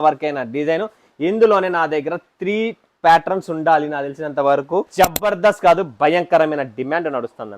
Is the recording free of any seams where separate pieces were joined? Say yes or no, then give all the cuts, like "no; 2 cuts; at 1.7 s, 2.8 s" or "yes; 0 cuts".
no; 1 cut; at 4.9 s